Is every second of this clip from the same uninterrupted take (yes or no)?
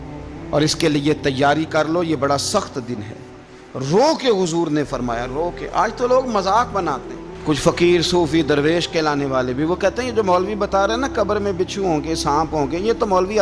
yes